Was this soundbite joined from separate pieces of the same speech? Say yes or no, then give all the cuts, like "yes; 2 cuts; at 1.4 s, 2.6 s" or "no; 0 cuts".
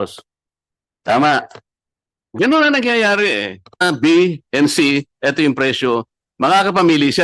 yes; 1 cut; at 3.8 s